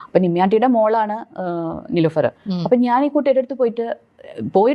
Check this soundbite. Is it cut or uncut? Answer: uncut